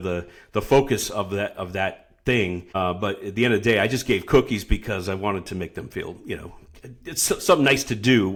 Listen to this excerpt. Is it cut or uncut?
uncut